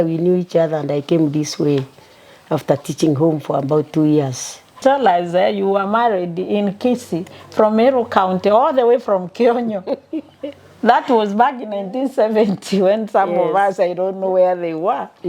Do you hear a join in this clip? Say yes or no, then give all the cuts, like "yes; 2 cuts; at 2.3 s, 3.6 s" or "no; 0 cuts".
yes; 1 cut; at 4.8 s